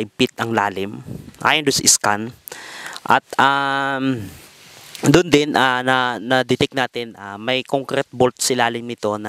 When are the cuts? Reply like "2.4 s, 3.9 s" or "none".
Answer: none